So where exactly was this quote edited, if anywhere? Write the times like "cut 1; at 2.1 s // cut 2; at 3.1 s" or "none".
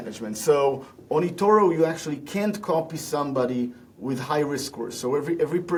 none